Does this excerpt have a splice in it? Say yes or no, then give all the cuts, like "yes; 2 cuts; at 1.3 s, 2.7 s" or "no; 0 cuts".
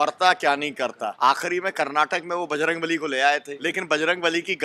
yes; 2 cuts; at 1.1 s, 3.5 s